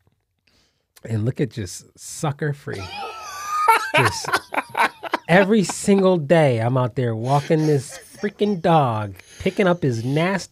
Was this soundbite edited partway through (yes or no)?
no